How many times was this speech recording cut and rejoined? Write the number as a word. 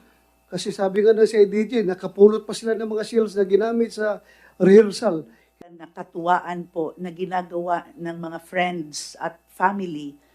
one